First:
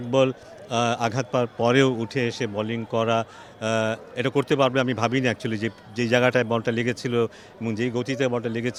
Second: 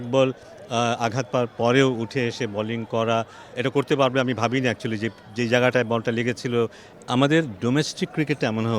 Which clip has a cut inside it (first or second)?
second